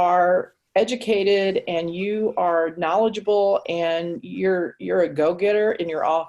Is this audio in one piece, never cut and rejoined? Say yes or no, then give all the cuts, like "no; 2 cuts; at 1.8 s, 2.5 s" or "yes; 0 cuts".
yes; 0 cuts